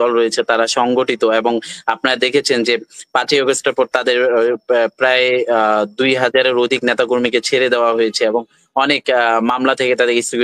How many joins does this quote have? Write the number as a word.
zero